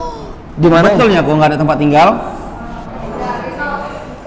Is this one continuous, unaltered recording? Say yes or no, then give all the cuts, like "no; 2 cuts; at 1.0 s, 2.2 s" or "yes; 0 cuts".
no; 1 cut; at 1.0 s